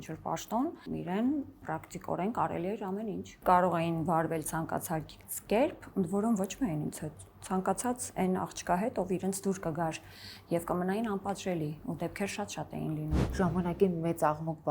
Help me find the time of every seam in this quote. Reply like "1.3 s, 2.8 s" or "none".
0.8 s, 1.6 s, 3.3 s, 13.2 s